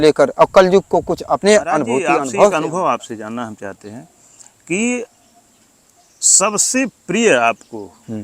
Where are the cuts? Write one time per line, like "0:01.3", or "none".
0:02.5